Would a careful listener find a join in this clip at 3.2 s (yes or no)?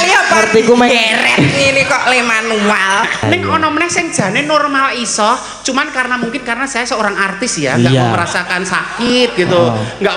yes